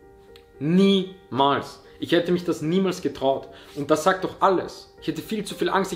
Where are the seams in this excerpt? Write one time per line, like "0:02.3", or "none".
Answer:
0:04.8

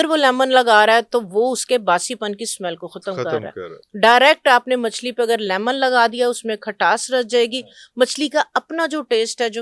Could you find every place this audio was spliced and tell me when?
none

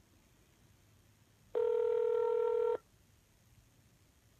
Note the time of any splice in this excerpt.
none

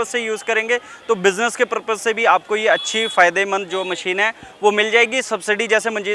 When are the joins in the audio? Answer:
none

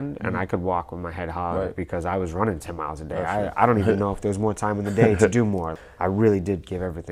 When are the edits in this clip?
0:05.7

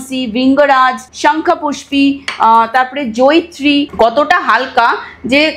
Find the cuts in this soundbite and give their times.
0:03.9

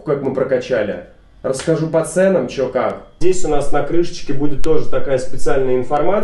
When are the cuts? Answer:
0:03.1

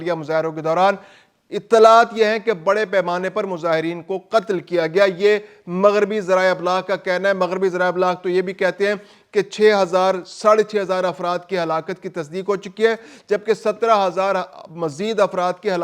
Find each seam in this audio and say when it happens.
none

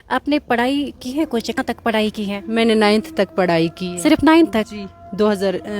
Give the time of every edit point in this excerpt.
0:01.6

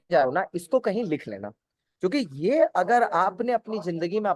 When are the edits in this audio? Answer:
none

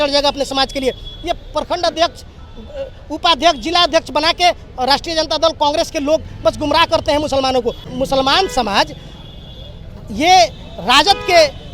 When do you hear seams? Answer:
0:07.9

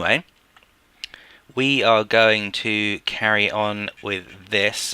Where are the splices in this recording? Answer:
0:03.3

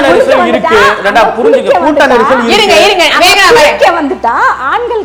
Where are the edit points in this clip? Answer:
none

